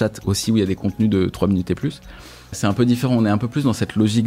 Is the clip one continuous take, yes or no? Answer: no